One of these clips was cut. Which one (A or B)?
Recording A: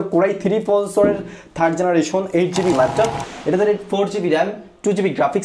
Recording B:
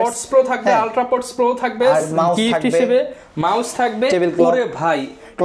A